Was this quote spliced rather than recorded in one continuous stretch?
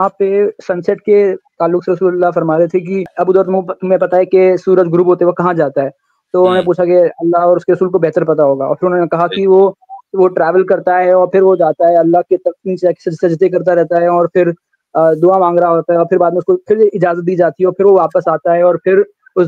yes; 1 cut; at 3.1 s

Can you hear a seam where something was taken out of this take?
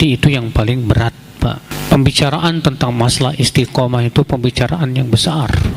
yes; 1 cut; at 1.7 s

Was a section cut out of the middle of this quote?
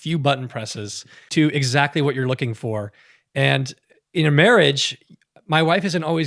yes; 1 cut; at 1.2 s

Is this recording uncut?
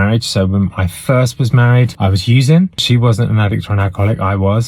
no; 2 cuts; at 1.9 s, 2.8 s

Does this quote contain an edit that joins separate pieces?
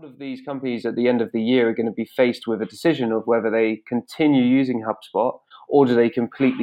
no; 0 cuts

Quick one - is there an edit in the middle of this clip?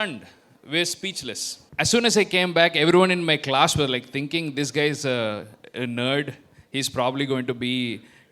yes; 1 cut; at 1.6 s

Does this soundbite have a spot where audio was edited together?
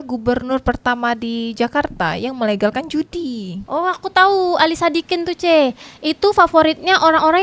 no; 0 cuts

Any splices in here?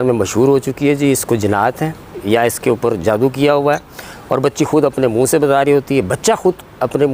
yes; 1 cut; at 2.2 s

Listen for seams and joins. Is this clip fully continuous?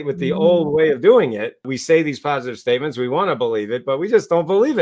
no; 1 cut; at 1.7 s

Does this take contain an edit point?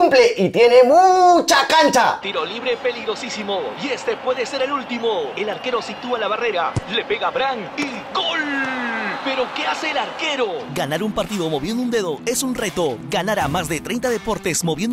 no; 0 cuts

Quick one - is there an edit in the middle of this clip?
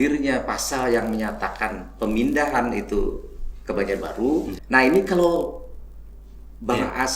yes; 1 cut; at 4.6 s

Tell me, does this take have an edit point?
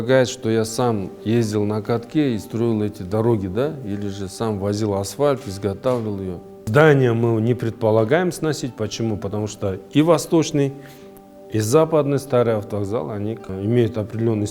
yes; 2 cuts; at 6.6 s, 13.5 s

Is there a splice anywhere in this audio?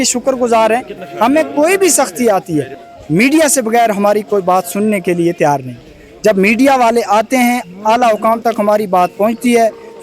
yes; 1 cut; at 0.9 s

